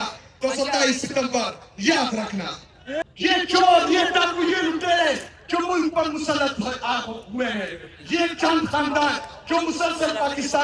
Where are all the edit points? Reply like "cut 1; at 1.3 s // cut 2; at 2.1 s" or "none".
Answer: cut 1; at 3.0 s